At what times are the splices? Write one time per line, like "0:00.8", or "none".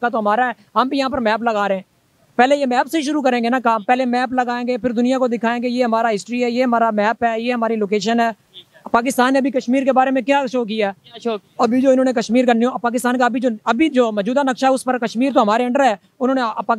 none